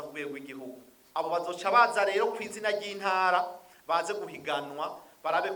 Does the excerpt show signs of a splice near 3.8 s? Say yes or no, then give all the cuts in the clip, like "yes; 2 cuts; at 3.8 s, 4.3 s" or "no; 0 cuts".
no; 1 cut; at 0.9 s